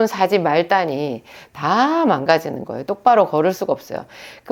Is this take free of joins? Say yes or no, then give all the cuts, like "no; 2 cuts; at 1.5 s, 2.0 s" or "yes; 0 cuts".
yes; 0 cuts